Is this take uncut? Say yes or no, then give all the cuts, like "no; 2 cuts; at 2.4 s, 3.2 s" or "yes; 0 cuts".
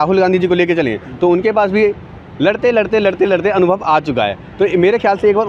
yes; 0 cuts